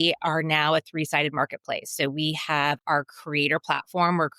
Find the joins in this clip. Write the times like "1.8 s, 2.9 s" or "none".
2.8 s